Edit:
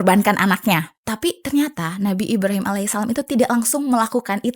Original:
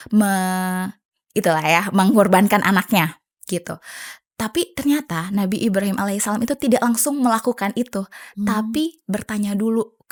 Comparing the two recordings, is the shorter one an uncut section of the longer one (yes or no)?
no